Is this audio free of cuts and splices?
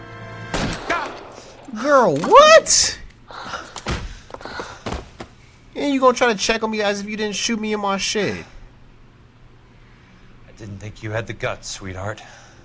yes; 0 cuts

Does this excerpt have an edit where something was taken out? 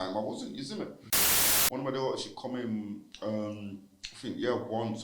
yes; 1 cut; at 1.2 s

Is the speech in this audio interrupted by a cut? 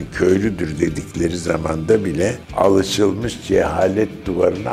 no; 0 cuts

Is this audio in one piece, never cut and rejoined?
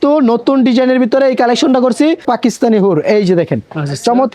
no; 1 cut; at 2.3 s

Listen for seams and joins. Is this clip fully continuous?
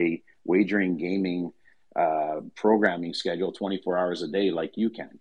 yes; 0 cuts

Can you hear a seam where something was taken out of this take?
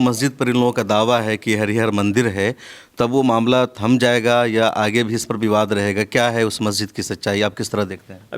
no; 0 cuts

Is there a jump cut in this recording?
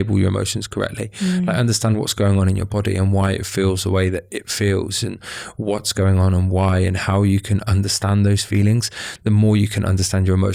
no; 0 cuts

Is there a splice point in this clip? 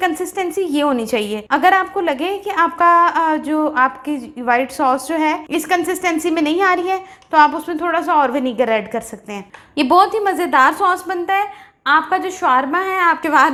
no; 0 cuts

